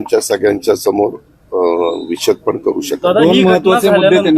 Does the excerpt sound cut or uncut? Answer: uncut